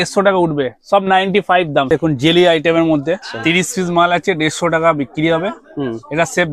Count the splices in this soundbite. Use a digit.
2